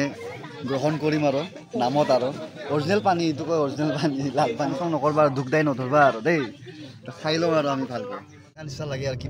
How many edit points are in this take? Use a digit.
2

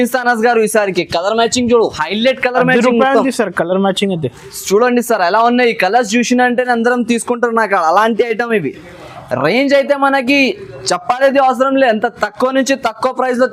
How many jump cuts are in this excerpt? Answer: 0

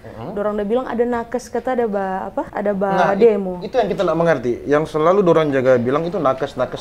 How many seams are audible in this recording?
1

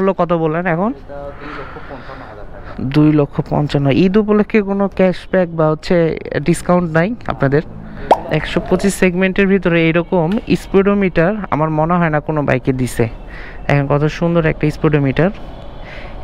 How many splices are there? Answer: 1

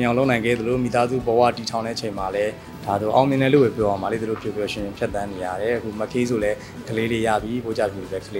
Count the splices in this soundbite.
0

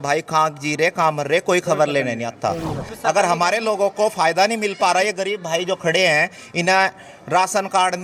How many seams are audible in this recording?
1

